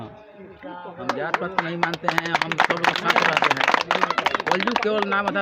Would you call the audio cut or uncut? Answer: uncut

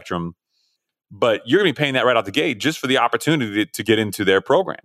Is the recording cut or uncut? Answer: cut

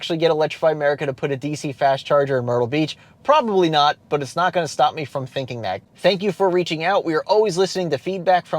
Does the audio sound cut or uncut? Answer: cut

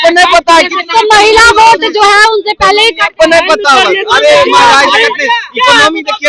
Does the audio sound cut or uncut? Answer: uncut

